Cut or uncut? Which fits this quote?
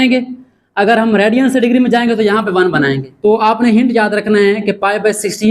cut